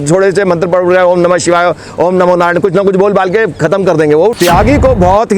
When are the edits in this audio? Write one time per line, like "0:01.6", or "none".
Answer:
0:04.3